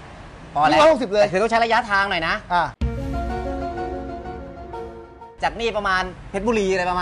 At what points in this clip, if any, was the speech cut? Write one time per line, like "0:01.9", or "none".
none

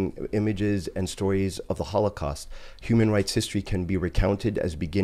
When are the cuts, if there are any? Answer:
none

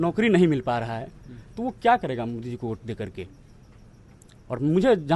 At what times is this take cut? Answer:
none

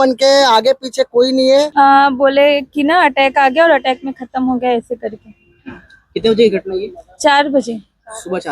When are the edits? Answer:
0:01.7

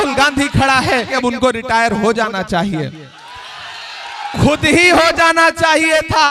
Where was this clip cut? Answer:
0:01.1

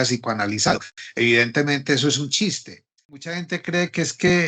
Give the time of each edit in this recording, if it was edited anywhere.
0:03.3

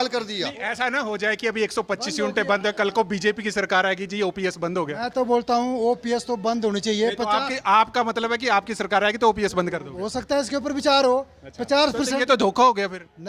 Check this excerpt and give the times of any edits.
none

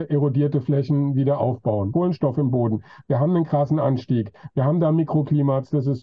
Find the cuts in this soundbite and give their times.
0:01.9

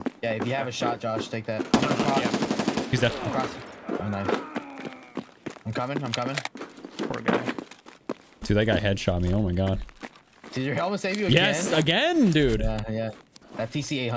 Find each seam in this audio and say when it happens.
none

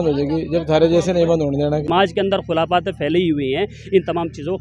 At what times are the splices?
0:01.9

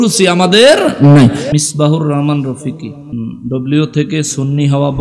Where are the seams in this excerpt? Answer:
0:01.5
0:03.1

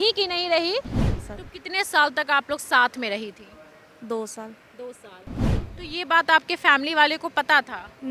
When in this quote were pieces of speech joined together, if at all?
0:01.0
0:05.6

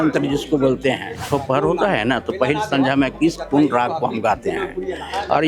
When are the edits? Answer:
0:01.2

